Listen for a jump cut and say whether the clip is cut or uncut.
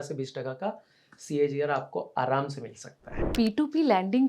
cut